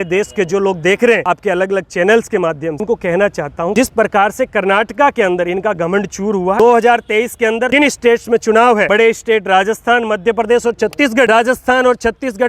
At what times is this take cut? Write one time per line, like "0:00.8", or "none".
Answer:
0:01.3
0:02.8
0:03.7
0:06.6
0:07.7
0:08.9
0:11.3